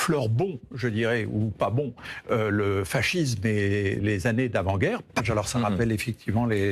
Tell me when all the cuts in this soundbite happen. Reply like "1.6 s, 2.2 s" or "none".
5.2 s